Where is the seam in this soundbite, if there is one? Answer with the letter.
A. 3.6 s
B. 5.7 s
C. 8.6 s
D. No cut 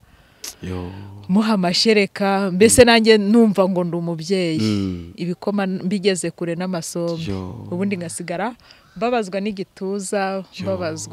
D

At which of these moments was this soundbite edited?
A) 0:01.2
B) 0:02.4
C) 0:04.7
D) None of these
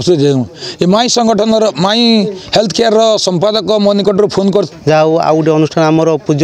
C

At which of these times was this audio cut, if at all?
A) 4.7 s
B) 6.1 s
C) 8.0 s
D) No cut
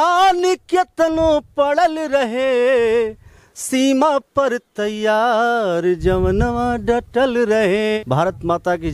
C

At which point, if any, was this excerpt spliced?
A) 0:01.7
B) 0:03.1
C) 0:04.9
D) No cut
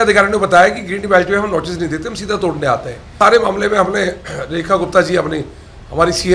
B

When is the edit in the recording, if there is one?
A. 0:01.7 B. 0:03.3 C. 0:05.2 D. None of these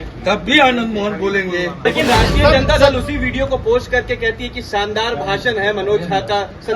A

